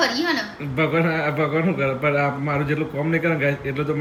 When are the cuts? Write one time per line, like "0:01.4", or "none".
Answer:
none